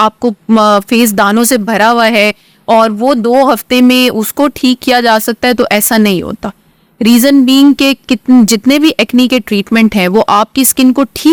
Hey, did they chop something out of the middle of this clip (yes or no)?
no